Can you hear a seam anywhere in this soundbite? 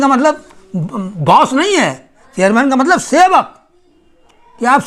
no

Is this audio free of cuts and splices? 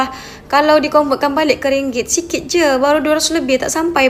yes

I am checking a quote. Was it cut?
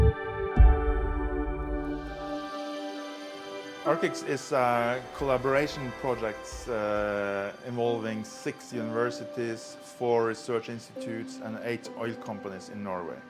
yes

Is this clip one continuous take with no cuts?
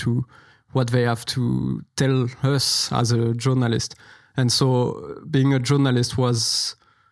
yes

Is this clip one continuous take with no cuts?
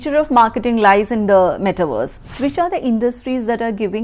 no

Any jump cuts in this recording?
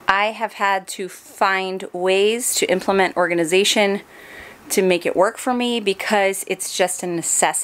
no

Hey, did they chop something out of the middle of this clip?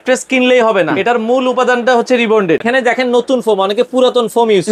yes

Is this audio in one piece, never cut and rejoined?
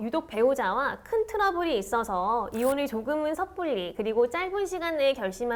yes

